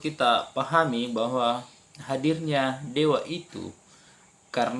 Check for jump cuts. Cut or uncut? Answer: uncut